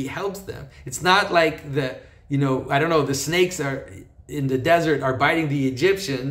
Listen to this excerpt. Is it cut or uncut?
uncut